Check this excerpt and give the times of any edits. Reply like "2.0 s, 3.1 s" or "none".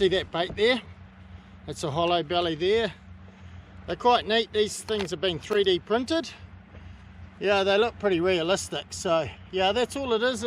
none